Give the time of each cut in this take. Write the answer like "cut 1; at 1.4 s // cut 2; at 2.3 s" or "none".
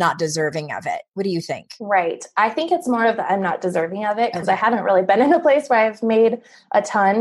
none